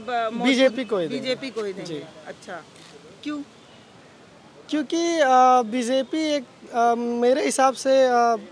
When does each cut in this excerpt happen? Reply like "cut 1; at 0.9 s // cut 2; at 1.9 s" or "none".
none